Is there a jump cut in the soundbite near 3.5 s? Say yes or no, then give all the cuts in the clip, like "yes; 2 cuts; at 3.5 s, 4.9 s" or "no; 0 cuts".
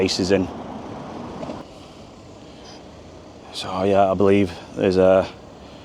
no; 1 cut; at 1.5 s